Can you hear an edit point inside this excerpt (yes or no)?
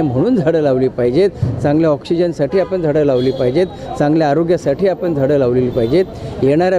no